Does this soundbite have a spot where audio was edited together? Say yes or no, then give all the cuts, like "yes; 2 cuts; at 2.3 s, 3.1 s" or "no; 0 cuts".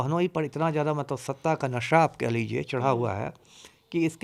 no; 0 cuts